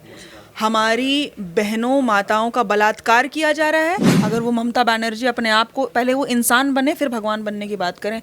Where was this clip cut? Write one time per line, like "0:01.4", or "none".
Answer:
0:04.1